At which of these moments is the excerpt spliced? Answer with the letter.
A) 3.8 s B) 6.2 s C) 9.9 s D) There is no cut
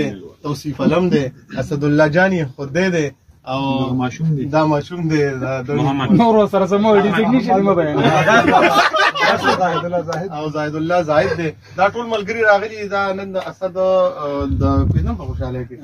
D